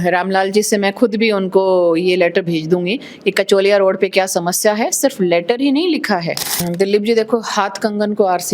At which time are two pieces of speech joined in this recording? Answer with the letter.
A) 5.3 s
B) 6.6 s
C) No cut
B